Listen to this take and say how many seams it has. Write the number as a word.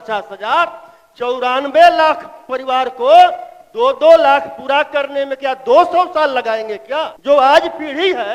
one